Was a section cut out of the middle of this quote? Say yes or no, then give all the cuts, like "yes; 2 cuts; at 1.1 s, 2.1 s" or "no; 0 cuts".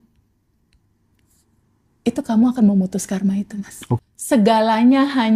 yes; 1 cut; at 4.0 s